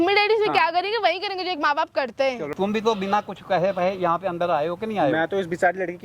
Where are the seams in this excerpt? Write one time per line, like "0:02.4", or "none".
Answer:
0:02.5